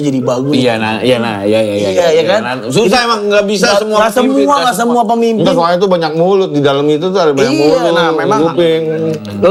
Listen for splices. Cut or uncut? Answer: uncut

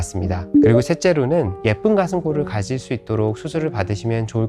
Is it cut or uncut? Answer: cut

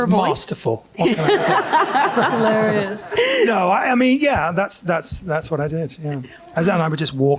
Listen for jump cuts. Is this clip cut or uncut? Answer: uncut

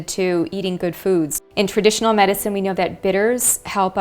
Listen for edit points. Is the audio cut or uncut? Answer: cut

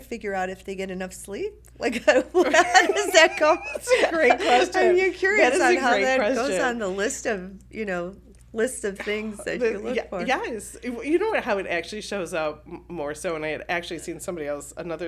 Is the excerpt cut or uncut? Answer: uncut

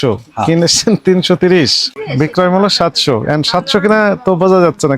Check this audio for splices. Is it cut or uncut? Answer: cut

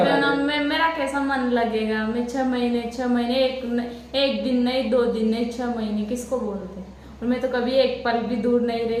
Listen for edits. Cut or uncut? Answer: uncut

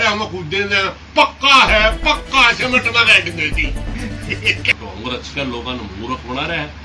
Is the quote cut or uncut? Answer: cut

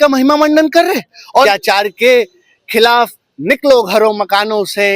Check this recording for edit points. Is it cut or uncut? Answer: cut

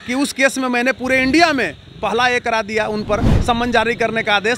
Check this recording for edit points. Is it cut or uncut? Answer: uncut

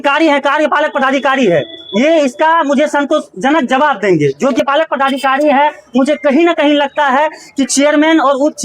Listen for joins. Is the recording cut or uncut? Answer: cut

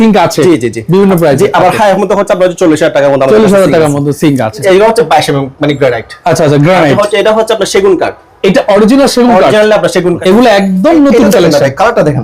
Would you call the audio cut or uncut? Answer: cut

